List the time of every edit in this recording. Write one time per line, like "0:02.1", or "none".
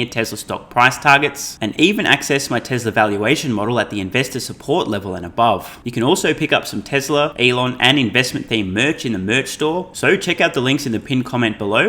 0:05.8
0:07.3
0:09.9